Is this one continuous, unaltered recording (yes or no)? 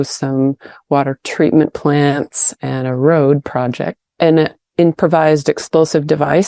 no